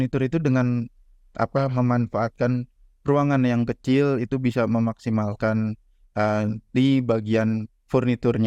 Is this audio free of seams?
yes; 0 cuts

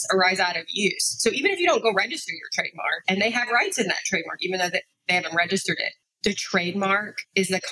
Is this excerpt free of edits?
no; 2 cuts; at 3.0 s, 5.9 s

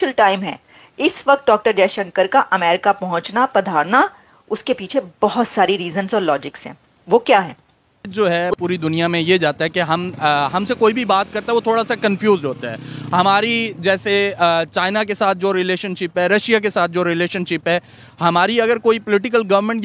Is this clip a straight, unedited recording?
no; 1 cut; at 8.1 s

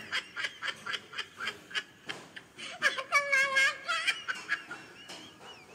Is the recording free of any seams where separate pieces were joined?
yes; 0 cuts

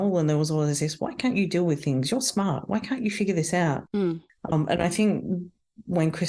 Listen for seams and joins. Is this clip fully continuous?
yes; 0 cuts

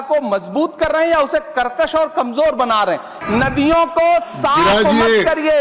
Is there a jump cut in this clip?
yes; 1 cut; at 3.1 s

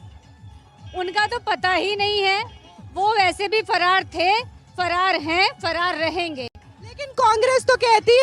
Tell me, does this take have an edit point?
no; 0 cuts

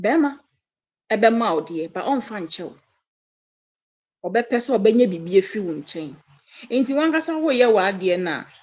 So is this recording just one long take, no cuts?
yes; 0 cuts

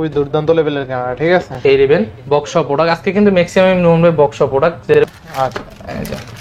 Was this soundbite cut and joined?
yes; 2 cuts; at 1.6 s, 4.9 s

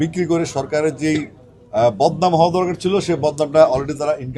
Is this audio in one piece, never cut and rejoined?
yes; 0 cuts

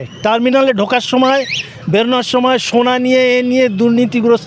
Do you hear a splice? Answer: no; 0 cuts

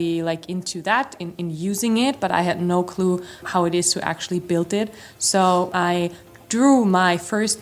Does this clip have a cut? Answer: yes; 2 cuts; at 3.4 s, 5.7 s

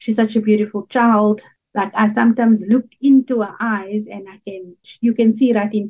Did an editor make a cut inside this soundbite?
yes; 2 cuts; at 1.5 s, 4.8 s

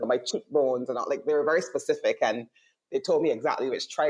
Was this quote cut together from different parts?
no; 0 cuts

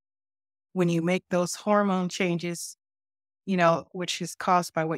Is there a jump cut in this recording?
no; 0 cuts

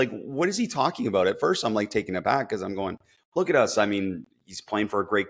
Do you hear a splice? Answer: no; 0 cuts

